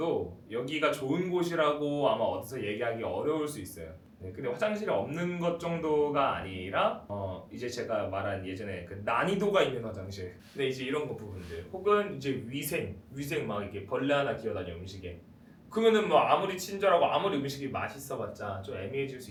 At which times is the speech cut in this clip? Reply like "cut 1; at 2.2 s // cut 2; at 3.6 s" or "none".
none